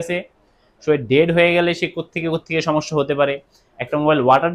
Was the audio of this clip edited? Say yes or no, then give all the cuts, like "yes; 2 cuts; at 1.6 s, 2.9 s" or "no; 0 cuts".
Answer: no; 0 cuts